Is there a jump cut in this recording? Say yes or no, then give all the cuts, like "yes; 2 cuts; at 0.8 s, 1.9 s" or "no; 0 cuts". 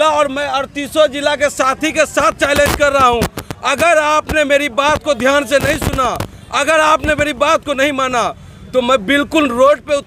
no; 0 cuts